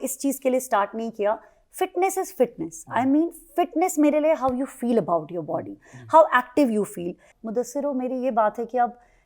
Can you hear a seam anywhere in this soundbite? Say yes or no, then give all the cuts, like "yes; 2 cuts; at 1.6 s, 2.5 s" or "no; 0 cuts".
yes; 1 cut; at 7.3 s